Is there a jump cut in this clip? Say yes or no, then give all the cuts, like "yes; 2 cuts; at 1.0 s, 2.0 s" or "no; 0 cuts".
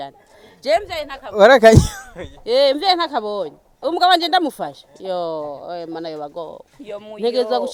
no; 0 cuts